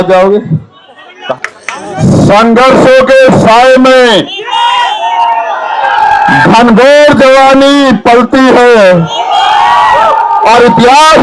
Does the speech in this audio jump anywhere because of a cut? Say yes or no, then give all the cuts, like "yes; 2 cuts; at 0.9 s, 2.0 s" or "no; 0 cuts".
yes; 1 cut; at 1.3 s